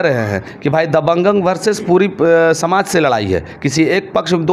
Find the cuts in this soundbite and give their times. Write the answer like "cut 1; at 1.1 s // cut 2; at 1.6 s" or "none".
none